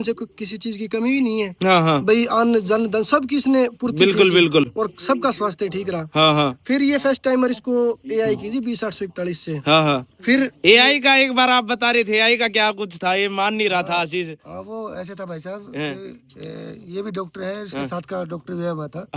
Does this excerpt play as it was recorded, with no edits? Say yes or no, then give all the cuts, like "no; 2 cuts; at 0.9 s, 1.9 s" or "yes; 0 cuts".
yes; 0 cuts